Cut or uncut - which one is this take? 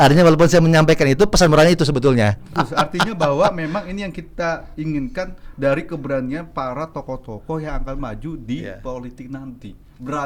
cut